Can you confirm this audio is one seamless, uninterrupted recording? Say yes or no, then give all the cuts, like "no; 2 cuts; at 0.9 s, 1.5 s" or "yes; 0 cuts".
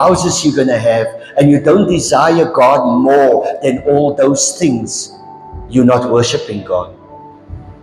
yes; 0 cuts